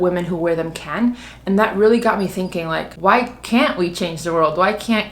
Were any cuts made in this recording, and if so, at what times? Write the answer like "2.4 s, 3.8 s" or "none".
2.9 s